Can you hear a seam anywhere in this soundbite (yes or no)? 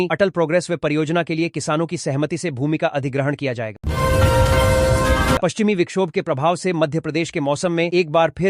yes